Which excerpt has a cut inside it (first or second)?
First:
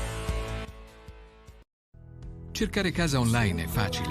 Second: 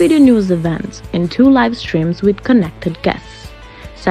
first